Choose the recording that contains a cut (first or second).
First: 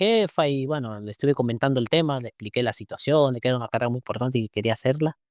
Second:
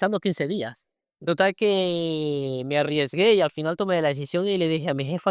second